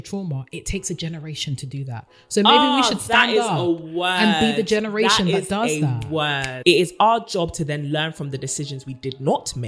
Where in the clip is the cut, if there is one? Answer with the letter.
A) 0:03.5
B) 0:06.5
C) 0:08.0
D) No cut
B